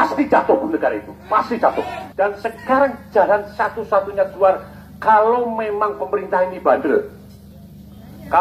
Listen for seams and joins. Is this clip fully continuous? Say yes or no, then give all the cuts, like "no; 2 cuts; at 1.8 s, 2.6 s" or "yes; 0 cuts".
no; 1 cut; at 2.0 s